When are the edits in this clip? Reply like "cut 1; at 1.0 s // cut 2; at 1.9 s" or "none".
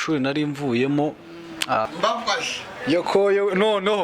cut 1; at 1.9 s